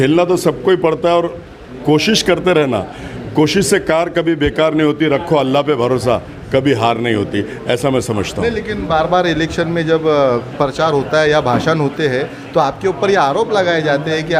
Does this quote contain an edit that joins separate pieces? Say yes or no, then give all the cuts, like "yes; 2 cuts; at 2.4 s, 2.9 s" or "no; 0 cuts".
no; 0 cuts